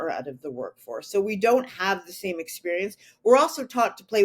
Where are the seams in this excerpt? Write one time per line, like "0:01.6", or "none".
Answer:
none